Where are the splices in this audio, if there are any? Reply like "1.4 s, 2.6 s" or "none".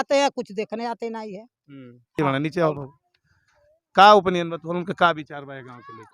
none

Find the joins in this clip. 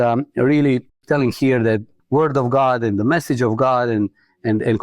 0.9 s, 1.9 s

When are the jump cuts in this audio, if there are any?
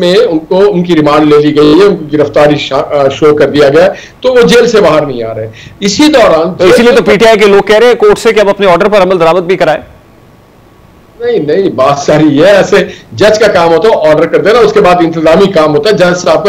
none

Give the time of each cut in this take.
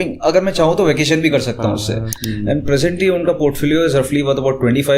2.1 s

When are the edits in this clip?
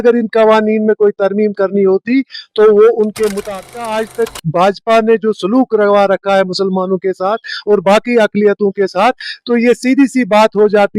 3.8 s

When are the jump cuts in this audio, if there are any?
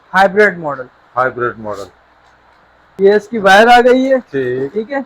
2.9 s

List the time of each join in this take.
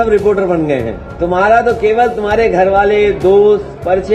1.0 s

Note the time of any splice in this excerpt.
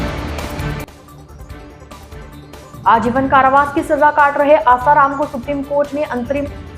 none

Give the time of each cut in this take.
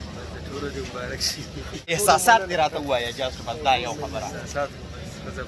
1.9 s

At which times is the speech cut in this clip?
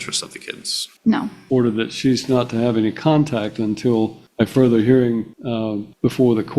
1.3 s, 4.2 s, 5.6 s

